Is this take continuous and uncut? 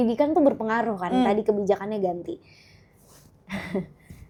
yes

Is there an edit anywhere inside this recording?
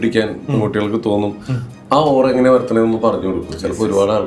no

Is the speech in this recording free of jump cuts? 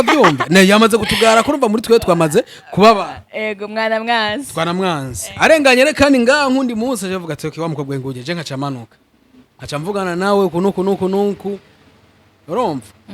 yes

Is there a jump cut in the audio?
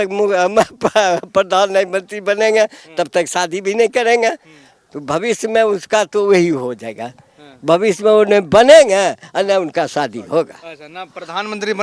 no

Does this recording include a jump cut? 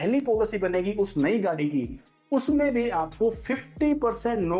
no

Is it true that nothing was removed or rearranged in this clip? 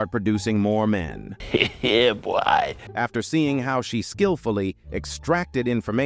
no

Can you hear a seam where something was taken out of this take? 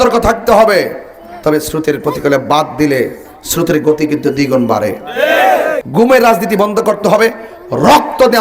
yes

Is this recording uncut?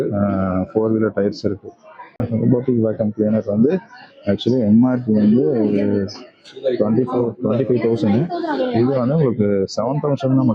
no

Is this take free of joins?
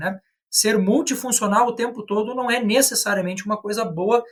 yes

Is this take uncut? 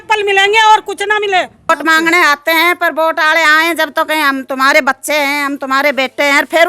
no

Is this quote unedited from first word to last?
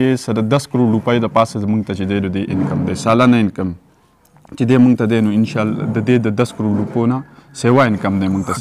yes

